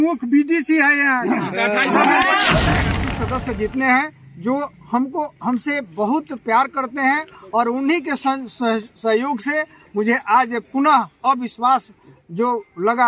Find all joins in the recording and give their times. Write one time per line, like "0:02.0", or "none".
0:03.0